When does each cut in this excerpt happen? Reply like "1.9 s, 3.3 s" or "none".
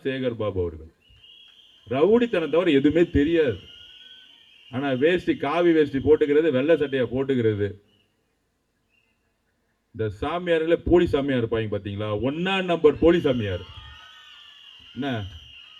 none